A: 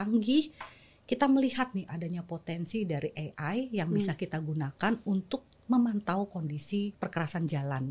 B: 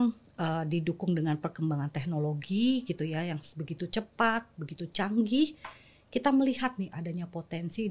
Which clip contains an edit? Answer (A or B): A